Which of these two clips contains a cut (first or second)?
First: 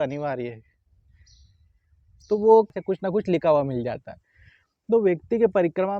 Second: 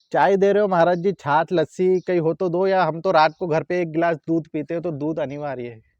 first